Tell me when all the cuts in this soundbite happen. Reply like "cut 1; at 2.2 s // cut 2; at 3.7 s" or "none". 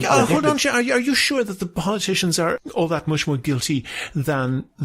cut 1; at 2.6 s